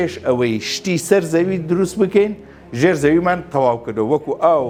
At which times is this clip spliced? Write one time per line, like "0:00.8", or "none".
none